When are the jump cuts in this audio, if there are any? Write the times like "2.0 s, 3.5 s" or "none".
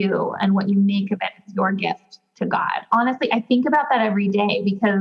2.9 s